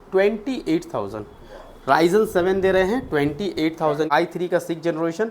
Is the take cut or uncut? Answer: cut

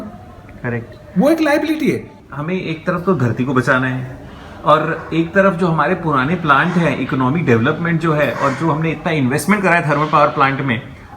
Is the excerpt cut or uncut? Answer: cut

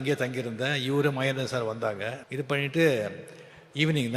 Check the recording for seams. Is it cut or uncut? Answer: cut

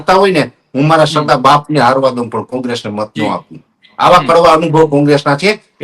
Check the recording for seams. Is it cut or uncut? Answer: uncut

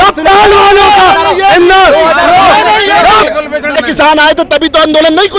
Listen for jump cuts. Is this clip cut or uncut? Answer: cut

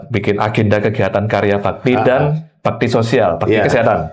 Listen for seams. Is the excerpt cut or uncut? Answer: uncut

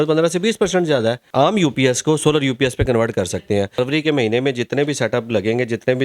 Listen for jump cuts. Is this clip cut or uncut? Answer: cut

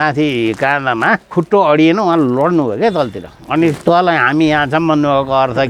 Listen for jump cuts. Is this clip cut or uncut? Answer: cut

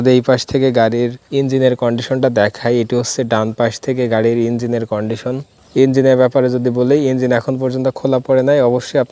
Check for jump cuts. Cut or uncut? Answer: cut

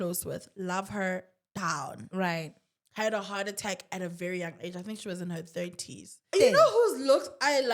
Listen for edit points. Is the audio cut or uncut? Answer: cut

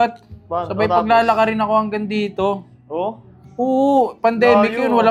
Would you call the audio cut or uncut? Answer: uncut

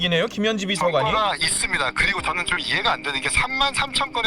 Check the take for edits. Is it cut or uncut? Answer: uncut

